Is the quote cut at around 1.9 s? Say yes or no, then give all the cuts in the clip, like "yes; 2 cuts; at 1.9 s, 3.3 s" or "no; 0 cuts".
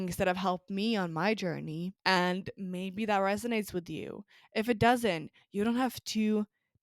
yes; 1 cut; at 1.9 s